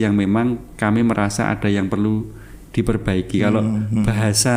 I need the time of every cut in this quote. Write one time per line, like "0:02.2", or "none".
none